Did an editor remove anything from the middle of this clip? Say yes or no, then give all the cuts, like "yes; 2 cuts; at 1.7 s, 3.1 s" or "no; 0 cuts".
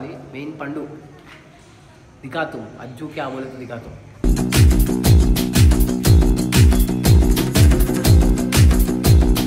no; 0 cuts